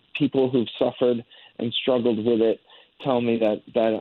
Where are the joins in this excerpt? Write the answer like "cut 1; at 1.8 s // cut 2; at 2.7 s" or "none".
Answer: none